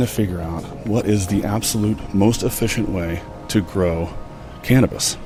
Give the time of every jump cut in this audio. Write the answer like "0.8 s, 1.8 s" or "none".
none

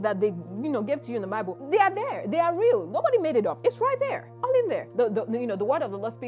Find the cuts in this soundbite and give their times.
1.6 s, 4.9 s

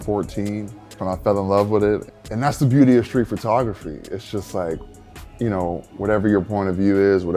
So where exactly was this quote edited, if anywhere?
none

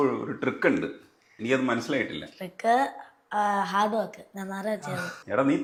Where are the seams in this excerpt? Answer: none

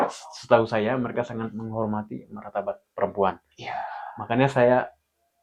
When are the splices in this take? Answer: none

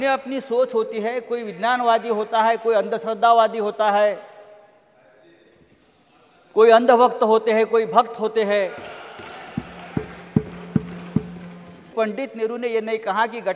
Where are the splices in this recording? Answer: 11.9 s

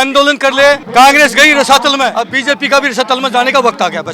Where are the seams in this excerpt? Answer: 0.8 s, 2.2 s

